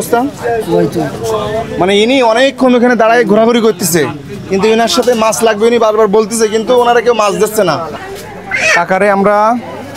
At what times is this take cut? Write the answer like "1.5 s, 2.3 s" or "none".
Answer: 8.0 s